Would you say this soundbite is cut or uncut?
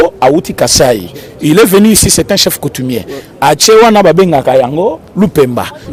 uncut